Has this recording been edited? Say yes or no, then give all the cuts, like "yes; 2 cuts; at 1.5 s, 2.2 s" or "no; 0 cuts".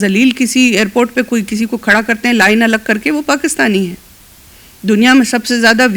no; 0 cuts